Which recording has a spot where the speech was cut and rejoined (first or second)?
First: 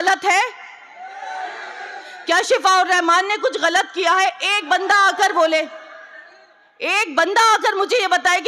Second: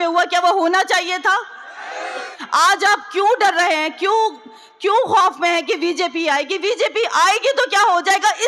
second